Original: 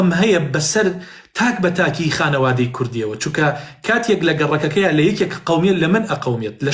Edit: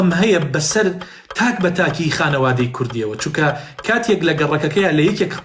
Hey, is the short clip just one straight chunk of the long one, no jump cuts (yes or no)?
yes